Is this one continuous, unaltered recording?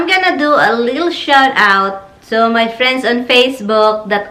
yes; 0 cuts

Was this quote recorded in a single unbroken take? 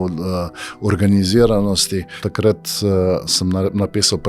no; 1 cut; at 2.2 s

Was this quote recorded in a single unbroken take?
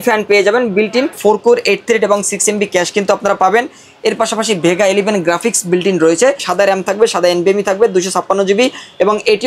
no; 2 cuts; at 1.2 s, 6.5 s

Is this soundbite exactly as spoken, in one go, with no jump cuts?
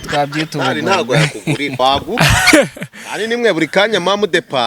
no; 1 cut; at 1.8 s

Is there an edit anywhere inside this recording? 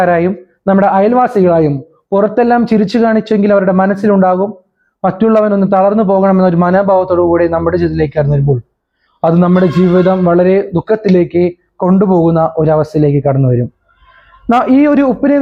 no; 0 cuts

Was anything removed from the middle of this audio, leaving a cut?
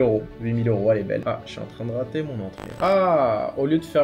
yes; 2 cuts; at 1.2 s, 2.8 s

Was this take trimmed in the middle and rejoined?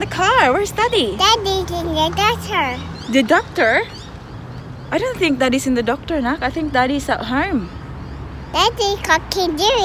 no; 0 cuts

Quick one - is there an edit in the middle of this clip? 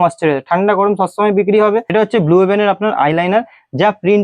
yes; 1 cut; at 1.9 s

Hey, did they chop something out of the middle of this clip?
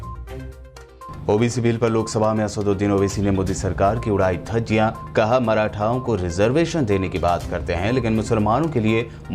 no; 0 cuts

